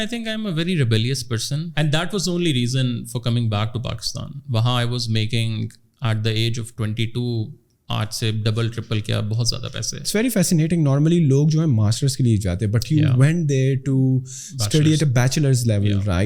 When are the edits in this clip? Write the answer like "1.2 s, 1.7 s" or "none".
1.7 s, 10.1 s

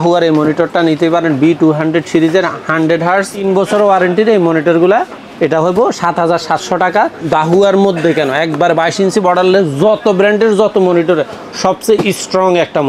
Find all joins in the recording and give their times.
3.5 s, 7.2 s

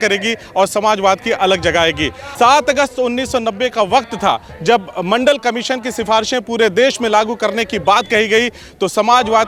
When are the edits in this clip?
none

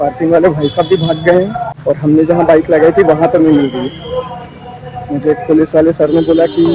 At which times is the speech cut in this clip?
1.7 s

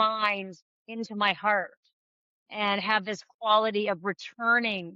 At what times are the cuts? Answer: none

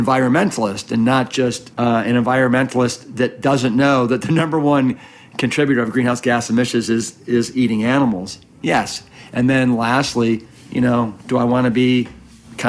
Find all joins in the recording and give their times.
1.6 s

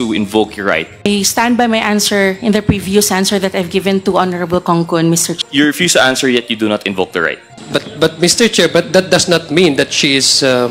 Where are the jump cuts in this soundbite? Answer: 1.1 s, 5.4 s, 7.5 s

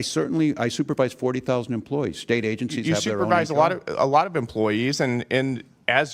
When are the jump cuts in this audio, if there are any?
none

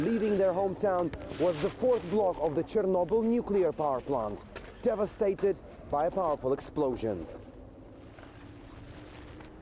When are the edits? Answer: 4.0 s

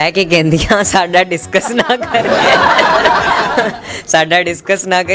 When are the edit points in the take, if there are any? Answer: none

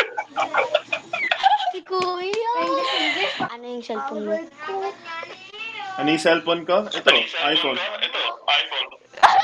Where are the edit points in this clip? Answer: 3.5 s

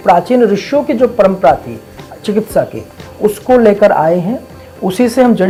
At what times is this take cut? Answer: none

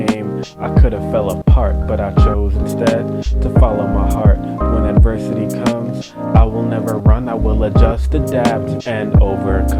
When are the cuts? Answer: none

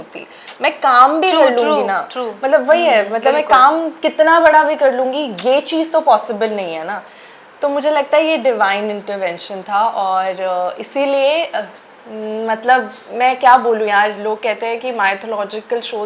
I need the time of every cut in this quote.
none

